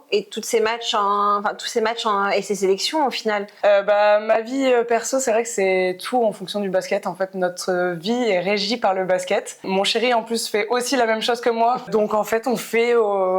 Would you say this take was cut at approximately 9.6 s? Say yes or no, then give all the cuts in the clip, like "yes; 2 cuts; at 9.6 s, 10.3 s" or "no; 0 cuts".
yes; 3 cuts; at 3.5 s, 9.6 s, 11.9 s